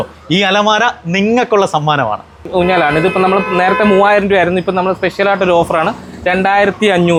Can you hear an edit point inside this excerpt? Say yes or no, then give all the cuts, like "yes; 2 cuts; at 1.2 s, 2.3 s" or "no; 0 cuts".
no; 0 cuts